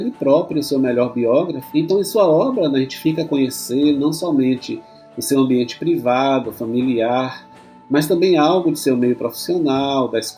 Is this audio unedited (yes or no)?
no